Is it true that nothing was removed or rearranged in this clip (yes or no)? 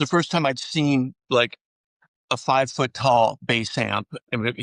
yes